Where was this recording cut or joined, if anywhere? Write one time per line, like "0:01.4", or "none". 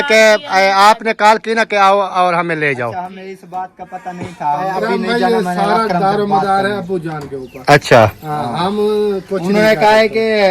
0:04.7